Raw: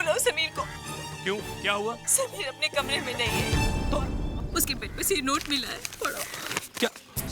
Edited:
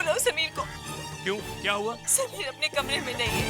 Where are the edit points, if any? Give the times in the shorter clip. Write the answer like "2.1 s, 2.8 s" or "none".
none